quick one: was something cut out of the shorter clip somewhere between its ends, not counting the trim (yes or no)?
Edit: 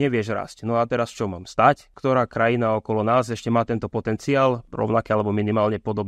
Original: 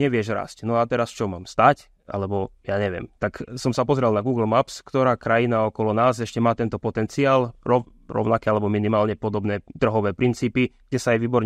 yes